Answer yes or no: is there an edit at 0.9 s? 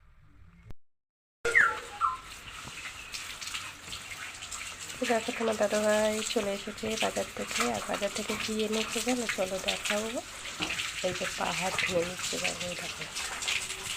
yes